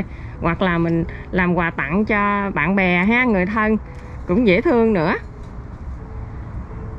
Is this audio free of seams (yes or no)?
yes